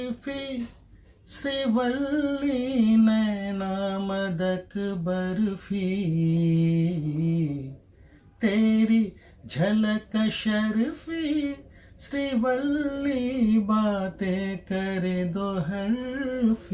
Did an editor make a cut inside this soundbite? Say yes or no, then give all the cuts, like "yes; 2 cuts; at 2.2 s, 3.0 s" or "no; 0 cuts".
no; 0 cuts